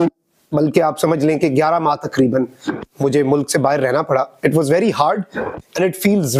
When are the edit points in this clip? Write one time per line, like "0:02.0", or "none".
none